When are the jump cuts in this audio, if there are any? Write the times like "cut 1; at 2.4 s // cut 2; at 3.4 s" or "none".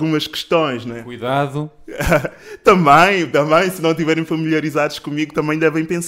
none